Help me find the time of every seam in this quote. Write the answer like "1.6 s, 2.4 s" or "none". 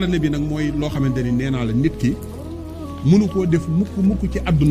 none

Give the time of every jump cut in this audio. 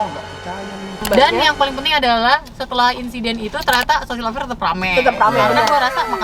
1.0 s

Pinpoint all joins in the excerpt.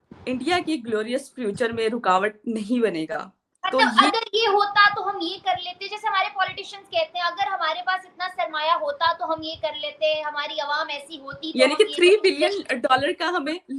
none

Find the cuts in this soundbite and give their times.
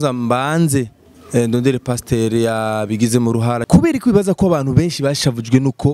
3.6 s

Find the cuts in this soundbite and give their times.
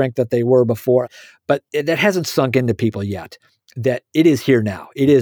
none

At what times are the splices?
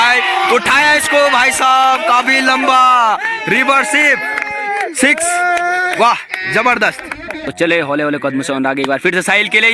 7.5 s

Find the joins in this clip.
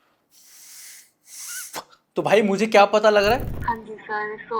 3.5 s

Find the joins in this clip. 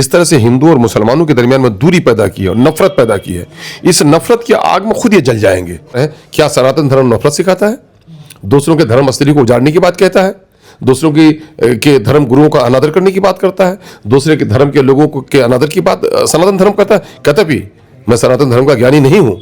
6.0 s

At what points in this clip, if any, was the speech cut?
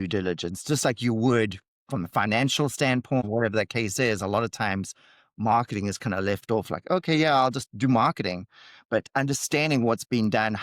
3.2 s

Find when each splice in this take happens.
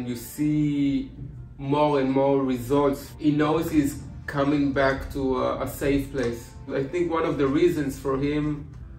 3.1 s, 6.7 s

